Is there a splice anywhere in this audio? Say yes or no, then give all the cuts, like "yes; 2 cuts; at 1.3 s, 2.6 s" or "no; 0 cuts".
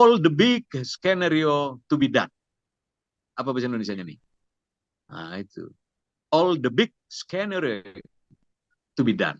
no; 0 cuts